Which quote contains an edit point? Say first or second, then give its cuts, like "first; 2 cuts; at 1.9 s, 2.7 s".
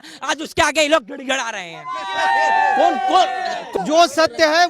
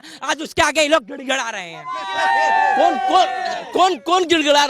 first; 1 cut; at 3.7 s